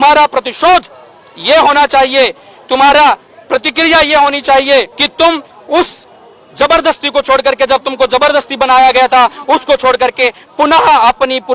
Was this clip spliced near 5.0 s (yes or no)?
yes